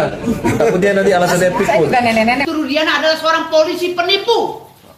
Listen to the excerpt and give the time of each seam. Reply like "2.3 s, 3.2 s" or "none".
2.4 s